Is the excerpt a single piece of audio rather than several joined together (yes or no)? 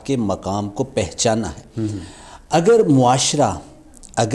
yes